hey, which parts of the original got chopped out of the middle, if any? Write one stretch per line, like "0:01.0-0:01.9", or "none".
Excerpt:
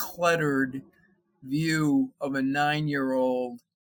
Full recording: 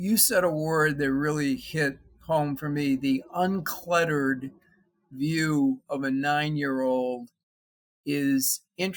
none

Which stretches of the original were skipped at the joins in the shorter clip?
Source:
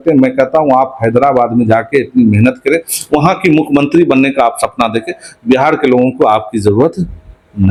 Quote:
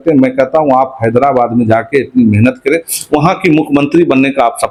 none

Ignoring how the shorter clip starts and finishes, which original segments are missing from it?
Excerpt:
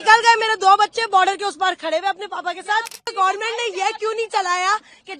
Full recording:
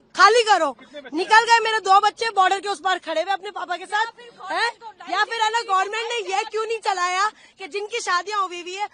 0:04.4-0:05.6

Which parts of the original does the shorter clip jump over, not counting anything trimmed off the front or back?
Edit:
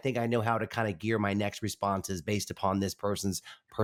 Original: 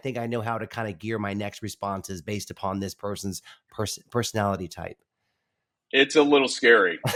none

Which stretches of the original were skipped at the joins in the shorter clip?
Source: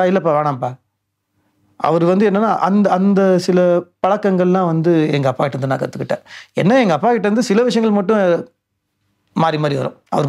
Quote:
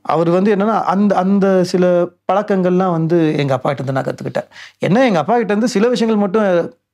none

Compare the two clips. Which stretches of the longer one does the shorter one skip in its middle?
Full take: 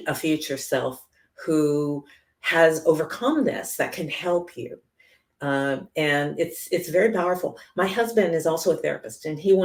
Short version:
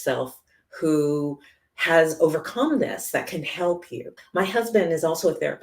0:04.9-0:07.6

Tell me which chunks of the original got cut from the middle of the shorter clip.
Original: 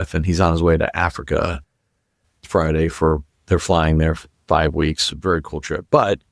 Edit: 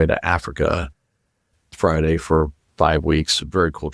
0:03.3-0:04.3

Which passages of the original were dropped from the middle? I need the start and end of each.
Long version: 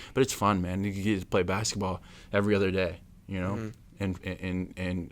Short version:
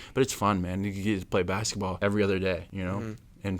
0:01.9-0:02.3
0:03.0-0:03.2

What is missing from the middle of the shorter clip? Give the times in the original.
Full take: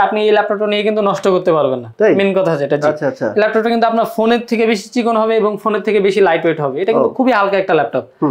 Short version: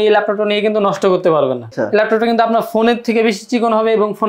0:01.9-0:03.1

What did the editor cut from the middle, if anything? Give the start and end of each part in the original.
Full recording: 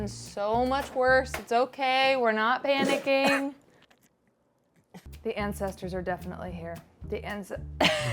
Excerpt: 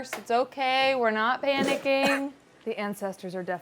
0:03.7-0:05.1

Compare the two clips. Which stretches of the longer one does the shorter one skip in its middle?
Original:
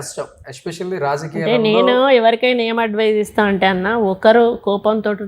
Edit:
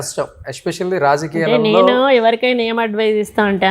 none

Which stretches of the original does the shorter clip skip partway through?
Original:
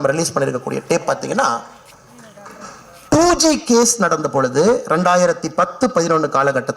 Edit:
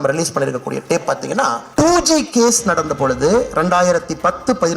0:01.6-0:03.0

